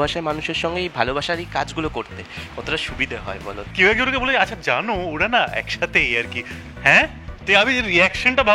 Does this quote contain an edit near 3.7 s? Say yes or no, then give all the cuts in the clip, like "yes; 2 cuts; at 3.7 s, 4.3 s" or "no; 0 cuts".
yes; 1 cut; at 3.7 s